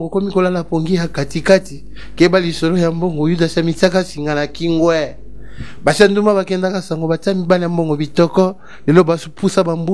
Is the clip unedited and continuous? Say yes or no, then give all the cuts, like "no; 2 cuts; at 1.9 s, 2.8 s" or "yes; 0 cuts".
yes; 0 cuts